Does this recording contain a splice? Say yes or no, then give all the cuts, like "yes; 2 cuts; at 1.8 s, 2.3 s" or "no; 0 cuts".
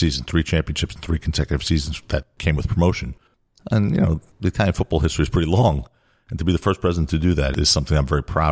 yes; 2 cuts; at 2.3 s, 7.5 s